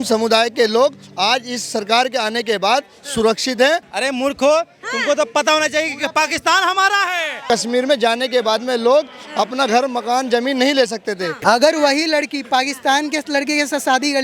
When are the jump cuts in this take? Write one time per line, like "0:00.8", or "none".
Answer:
0:03.9
0:07.4
0:11.3